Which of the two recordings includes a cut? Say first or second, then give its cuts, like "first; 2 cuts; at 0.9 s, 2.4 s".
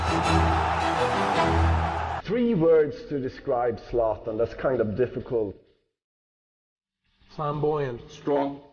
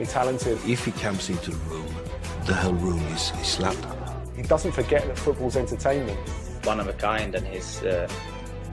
first; 1 cut; at 5.1 s